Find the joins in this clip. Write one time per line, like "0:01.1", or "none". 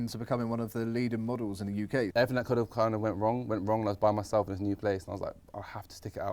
0:02.1